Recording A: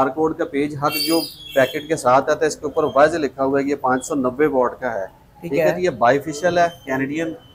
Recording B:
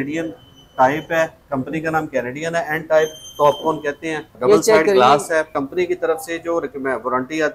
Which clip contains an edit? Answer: B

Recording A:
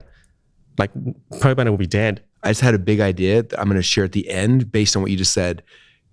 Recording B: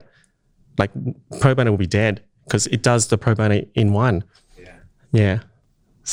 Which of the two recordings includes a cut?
A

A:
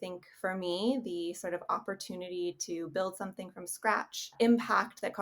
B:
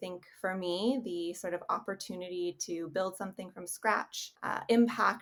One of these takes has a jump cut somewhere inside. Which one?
A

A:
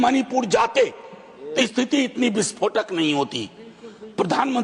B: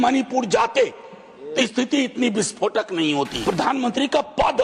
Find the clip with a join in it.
B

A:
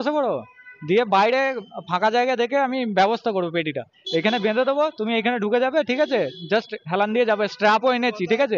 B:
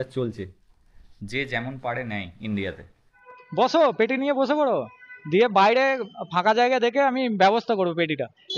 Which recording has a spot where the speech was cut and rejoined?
B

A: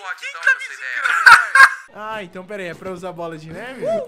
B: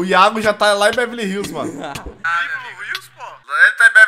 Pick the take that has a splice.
A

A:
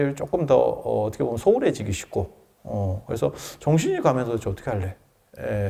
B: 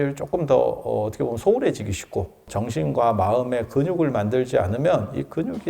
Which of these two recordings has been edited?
B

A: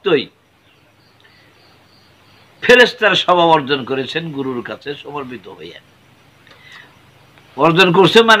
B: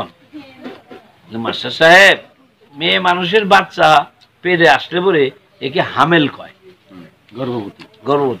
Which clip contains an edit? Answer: B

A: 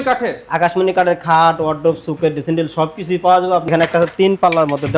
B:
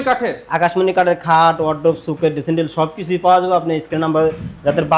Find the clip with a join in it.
A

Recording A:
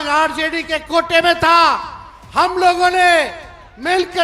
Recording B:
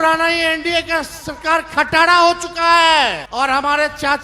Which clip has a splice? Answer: B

